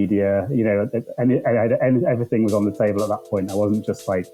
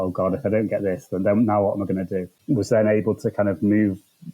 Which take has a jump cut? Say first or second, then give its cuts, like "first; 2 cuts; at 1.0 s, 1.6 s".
second; 1 cut; at 2.4 s